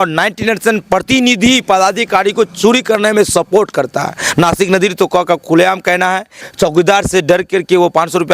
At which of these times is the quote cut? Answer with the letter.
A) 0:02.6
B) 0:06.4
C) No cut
B